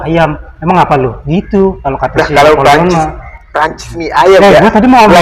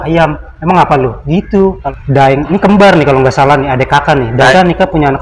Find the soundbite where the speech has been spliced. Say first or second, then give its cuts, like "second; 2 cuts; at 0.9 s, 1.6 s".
second; 2 cuts; at 1.9 s, 4.5 s